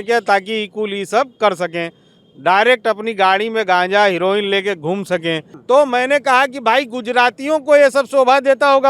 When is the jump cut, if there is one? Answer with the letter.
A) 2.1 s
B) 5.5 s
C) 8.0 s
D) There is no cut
B